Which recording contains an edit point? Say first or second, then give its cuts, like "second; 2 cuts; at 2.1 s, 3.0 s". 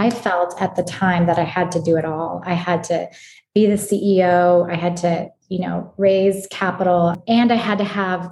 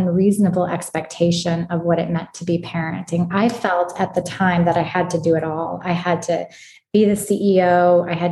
first; 1 cut; at 7.2 s